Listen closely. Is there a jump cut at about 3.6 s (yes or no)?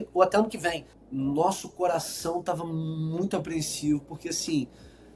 no